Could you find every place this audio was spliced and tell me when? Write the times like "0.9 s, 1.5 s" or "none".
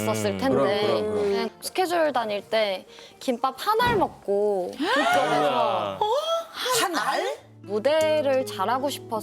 1.4 s, 7.5 s